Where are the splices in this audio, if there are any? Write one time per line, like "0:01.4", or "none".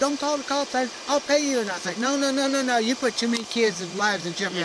none